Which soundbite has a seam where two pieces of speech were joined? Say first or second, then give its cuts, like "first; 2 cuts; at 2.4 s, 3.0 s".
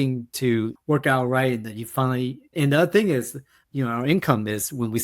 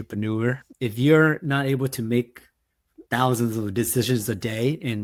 first; 2 cuts; at 2.5 s, 3.8 s